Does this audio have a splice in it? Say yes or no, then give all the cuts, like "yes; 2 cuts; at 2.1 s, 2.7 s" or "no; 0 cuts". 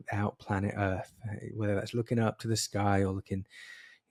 no; 0 cuts